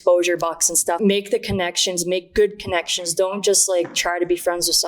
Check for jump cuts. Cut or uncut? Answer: cut